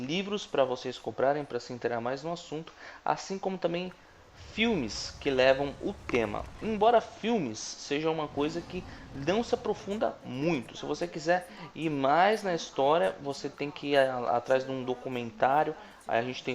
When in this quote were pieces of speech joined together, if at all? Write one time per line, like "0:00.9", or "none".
0:15.0